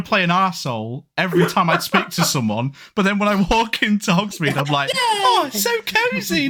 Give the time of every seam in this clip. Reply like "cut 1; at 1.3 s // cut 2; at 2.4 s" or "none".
none